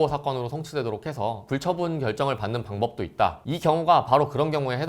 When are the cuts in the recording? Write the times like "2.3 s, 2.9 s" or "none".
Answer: 3.4 s